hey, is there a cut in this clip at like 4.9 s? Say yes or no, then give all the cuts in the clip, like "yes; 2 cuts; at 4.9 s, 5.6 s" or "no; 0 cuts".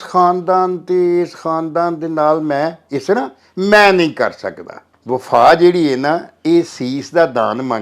yes; 1 cut; at 4.9 s